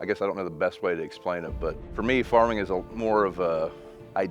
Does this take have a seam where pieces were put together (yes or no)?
yes